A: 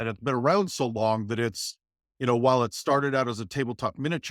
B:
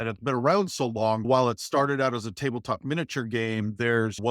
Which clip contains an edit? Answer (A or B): B